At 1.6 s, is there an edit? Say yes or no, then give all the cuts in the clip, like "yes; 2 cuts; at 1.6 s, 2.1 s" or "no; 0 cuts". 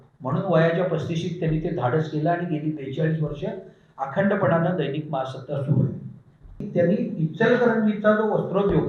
no; 1 cut; at 6.7 s